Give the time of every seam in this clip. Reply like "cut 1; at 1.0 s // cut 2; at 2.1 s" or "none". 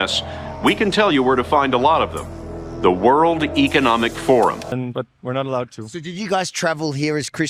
cut 1; at 4.7 s